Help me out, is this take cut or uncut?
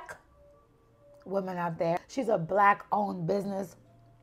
cut